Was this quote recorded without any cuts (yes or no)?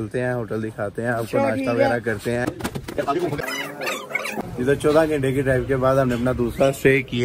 no